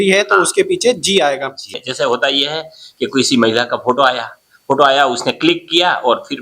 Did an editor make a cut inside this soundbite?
yes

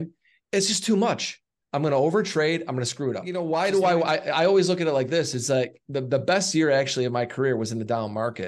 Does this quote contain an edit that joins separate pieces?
yes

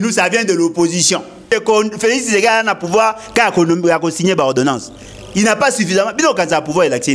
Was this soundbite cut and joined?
yes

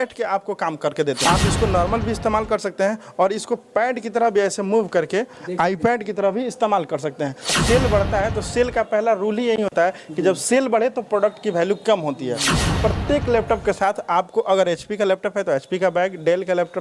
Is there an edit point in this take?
yes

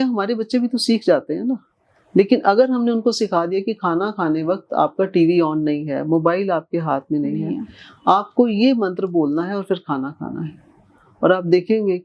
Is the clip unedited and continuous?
yes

